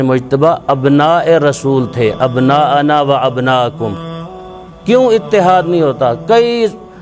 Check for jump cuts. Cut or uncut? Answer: cut